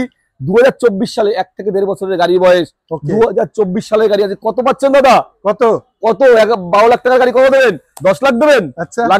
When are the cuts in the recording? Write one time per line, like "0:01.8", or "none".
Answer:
none